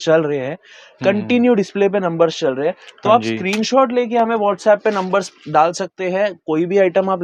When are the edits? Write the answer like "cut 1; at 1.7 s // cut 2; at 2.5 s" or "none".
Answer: none